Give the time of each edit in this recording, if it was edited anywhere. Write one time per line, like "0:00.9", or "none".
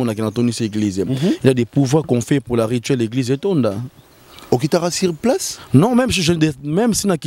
none